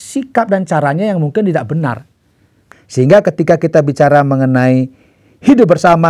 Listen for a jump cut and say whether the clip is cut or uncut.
cut